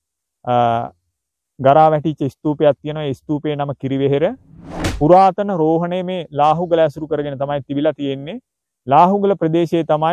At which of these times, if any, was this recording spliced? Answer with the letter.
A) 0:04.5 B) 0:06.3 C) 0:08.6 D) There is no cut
A